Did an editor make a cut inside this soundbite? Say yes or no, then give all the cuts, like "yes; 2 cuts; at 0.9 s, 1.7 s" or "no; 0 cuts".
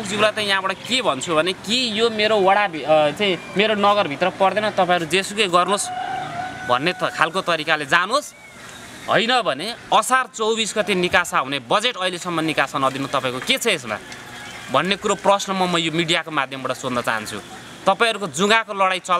no; 0 cuts